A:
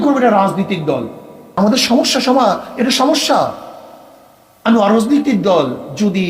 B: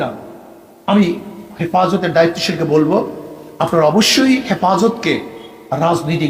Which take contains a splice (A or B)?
A